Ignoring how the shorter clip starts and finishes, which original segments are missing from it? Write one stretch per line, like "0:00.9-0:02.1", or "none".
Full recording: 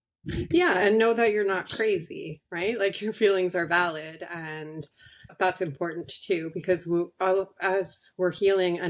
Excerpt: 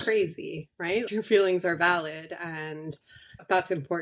0:02.8-0:03.0

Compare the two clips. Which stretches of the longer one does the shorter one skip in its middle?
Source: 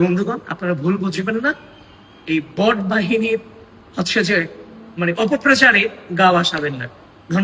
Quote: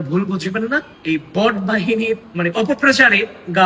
0:01.7-0:02.2
0:03.5-0:04.9

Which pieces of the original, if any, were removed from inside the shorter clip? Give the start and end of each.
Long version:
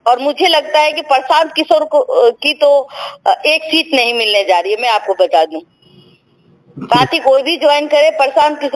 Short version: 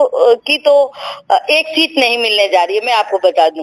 none

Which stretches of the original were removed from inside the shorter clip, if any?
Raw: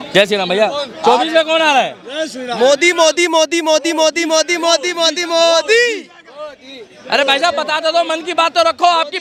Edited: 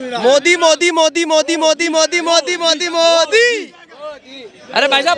none

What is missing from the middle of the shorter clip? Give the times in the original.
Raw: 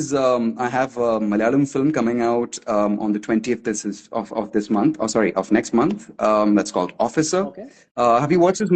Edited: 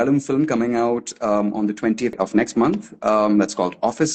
0:03.6-0:05.3

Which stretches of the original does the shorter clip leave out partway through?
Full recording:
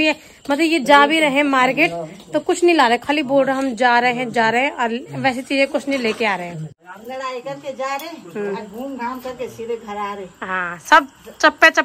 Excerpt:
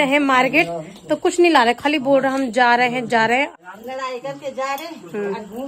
0:04.7-0:06.7

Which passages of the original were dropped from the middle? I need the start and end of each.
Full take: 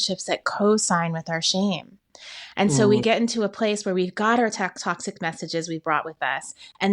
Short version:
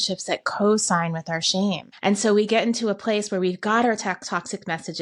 0:01.9-0:02.4

